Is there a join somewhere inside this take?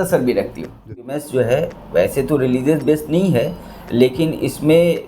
yes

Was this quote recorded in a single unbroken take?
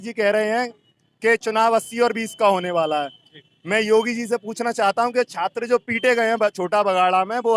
yes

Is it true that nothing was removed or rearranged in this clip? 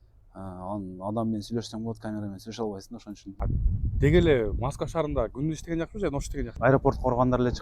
no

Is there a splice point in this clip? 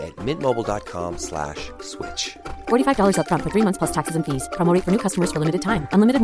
no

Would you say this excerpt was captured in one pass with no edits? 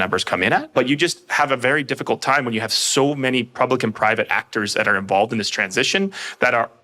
yes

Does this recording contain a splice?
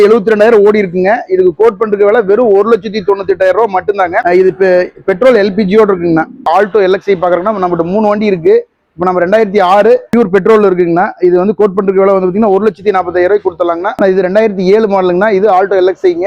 no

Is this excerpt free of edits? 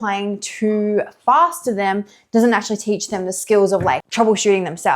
no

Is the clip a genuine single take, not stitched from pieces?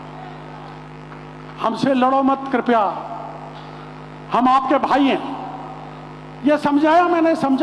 yes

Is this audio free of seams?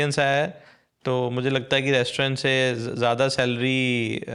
yes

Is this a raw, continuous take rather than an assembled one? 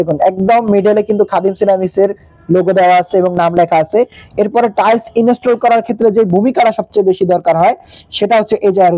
yes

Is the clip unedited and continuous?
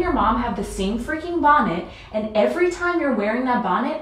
yes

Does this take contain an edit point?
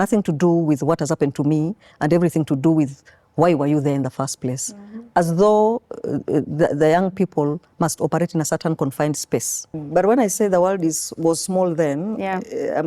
yes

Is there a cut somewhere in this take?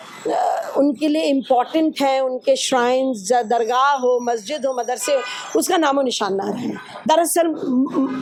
no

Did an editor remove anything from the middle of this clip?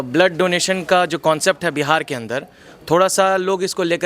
no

